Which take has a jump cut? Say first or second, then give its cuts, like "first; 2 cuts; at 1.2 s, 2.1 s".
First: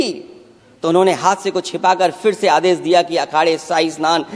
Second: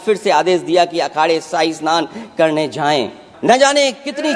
second; 1 cut; at 3.2 s